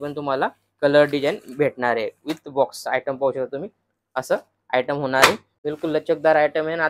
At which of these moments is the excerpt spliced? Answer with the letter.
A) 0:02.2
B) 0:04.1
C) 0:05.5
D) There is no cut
C